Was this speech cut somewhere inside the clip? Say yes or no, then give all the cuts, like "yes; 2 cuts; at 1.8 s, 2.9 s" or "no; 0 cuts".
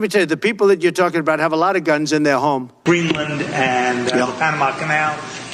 yes; 1 cut; at 2.8 s